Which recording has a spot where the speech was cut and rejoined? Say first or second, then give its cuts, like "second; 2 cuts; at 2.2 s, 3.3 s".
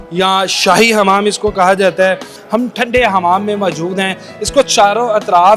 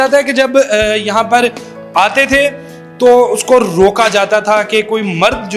first; 1 cut; at 2.3 s